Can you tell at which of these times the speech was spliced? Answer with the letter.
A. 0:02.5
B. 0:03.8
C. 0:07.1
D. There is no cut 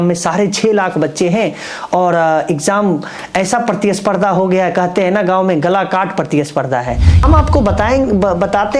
C